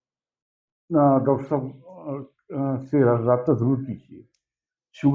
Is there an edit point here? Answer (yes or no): no